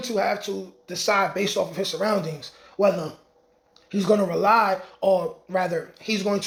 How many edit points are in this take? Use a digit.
0